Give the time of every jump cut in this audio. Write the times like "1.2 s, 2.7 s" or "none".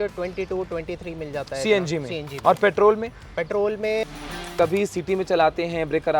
4.4 s